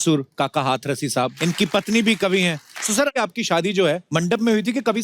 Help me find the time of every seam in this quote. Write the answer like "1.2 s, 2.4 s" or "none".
1.3 s, 3.1 s, 4.0 s